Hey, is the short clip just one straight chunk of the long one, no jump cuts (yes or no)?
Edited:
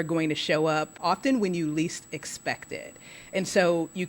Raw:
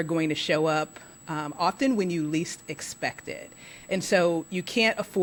no